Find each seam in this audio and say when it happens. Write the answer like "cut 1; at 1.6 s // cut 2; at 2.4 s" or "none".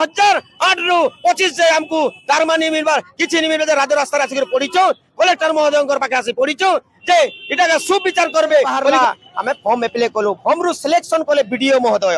cut 1; at 8.9 s